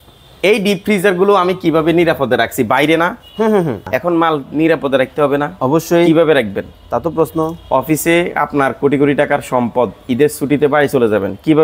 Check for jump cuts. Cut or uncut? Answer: cut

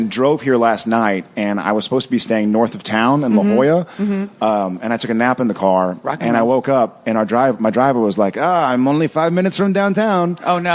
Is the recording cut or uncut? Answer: cut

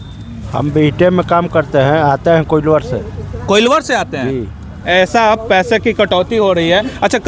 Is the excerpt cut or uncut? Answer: cut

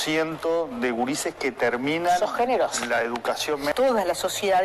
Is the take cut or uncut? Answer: cut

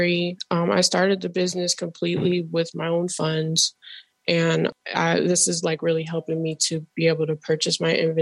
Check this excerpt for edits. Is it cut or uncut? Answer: cut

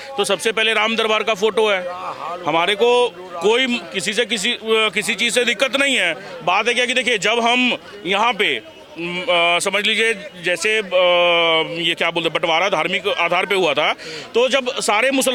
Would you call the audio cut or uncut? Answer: uncut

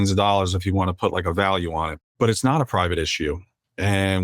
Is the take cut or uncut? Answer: cut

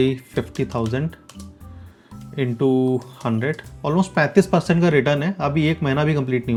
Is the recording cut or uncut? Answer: uncut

